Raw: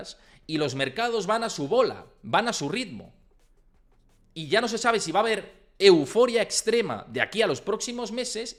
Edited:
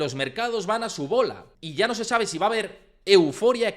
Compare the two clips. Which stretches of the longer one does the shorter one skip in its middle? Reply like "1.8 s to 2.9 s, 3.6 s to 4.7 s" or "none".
2.1 s to 4.2 s